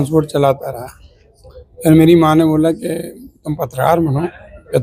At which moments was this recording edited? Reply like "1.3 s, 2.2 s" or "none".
none